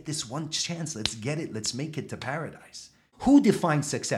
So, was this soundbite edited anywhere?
yes; 1 cut; at 3.1 s

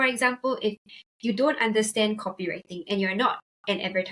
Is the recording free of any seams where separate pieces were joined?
yes; 0 cuts

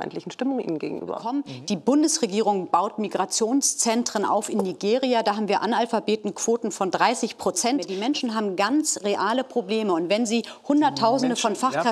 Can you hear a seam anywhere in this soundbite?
yes; 2 cuts; at 1.3 s, 7.9 s

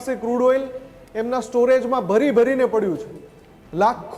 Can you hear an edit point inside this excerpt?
no; 0 cuts

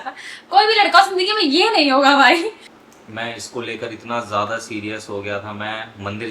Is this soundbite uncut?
no; 1 cut; at 2.7 s

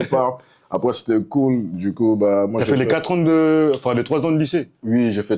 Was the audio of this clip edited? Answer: no; 0 cuts

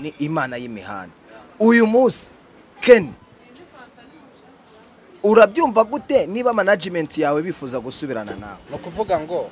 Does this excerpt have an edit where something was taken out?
yes; 1 cut; at 8.5 s

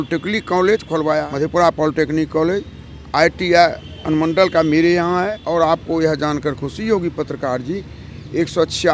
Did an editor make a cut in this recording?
yes; 2 cuts; at 1.3 s, 5.4 s

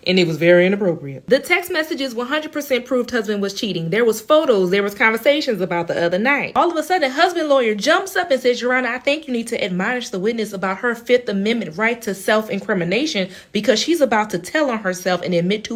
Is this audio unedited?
yes; 0 cuts

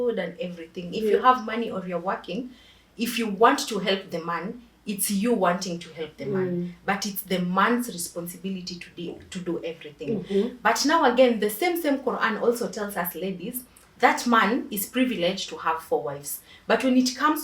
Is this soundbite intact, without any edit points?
yes; 0 cuts

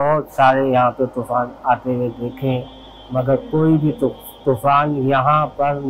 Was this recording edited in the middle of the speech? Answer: no; 0 cuts

